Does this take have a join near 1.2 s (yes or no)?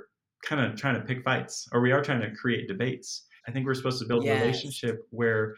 no